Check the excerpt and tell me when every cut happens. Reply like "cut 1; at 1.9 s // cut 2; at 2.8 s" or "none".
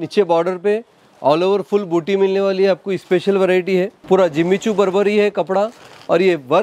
cut 1; at 4.0 s